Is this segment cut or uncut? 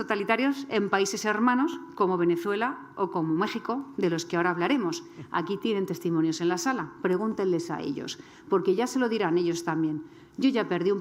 uncut